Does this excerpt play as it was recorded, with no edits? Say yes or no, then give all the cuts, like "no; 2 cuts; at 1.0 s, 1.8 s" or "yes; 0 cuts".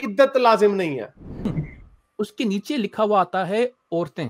no; 1 cut; at 1.5 s